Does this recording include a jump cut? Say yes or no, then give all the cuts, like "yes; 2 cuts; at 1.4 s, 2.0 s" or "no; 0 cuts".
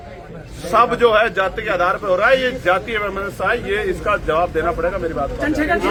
no; 0 cuts